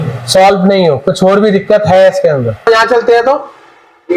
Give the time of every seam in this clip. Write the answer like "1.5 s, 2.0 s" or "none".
2.6 s

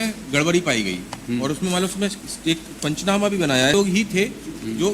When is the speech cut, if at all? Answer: 3.7 s

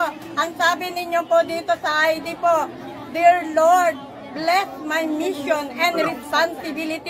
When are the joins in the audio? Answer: none

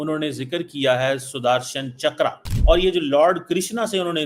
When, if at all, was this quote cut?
2.5 s

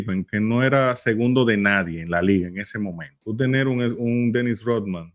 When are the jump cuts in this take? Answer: 3.1 s

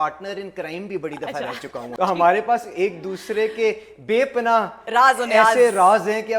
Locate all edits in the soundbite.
1.9 s

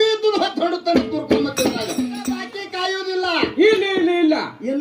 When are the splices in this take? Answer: 2.2 s

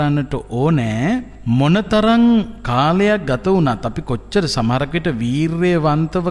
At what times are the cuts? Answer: 1.3 s

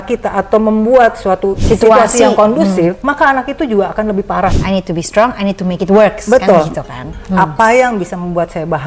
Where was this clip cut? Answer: 3.0 s, 4.6 s

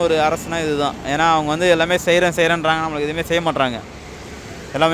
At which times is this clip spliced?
none

